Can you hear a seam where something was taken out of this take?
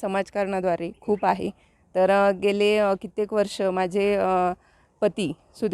no; 0 cuts

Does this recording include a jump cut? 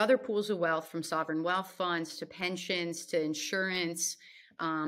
no; 0 cuts

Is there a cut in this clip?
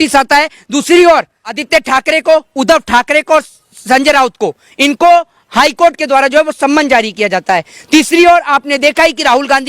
yes; 1 cut; at 1.6 s

